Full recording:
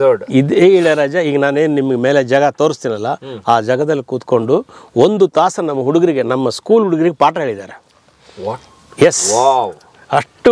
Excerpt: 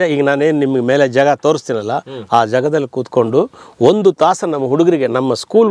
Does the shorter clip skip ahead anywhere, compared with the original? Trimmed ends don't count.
no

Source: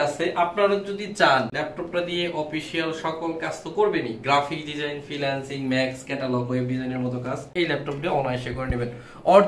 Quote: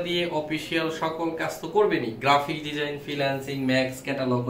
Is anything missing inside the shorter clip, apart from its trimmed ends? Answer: no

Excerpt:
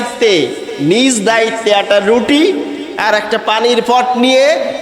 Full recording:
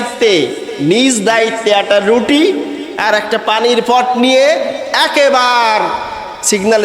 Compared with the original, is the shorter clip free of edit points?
yes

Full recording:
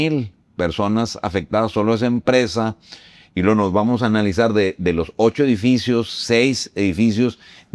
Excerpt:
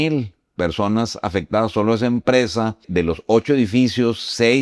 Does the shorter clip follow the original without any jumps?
no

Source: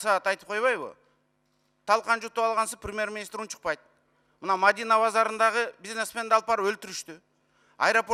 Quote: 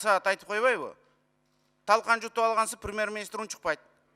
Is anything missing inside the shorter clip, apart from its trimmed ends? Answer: no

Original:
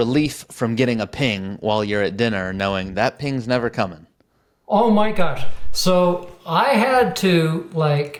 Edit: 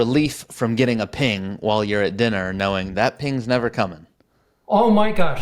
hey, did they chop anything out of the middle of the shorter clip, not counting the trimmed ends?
no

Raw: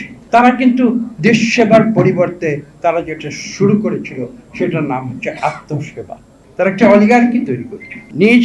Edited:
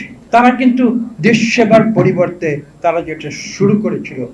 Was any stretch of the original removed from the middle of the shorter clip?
no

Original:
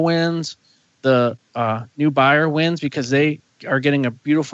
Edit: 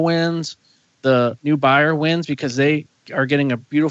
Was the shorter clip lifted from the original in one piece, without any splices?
no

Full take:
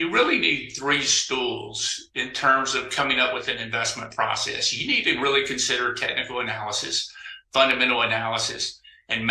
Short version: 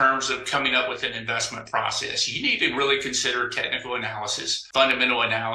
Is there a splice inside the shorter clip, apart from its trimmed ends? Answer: yes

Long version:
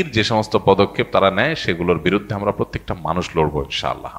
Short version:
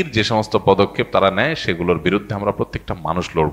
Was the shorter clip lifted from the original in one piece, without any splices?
yes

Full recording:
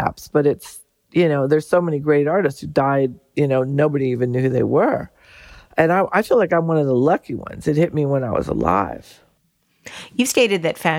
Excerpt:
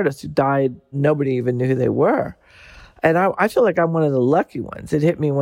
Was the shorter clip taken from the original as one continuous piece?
no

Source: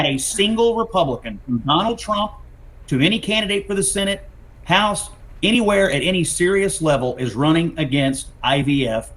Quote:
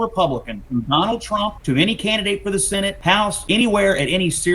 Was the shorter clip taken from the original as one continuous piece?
no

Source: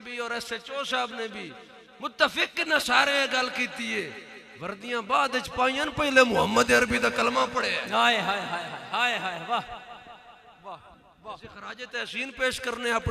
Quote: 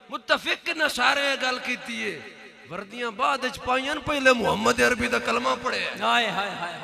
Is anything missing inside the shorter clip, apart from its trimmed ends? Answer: no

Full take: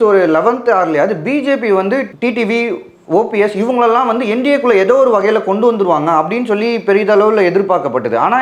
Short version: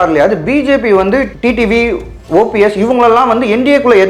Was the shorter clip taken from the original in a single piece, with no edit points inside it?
yes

